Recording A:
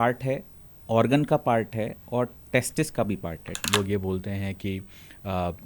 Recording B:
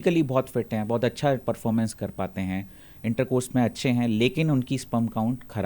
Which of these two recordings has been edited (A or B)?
A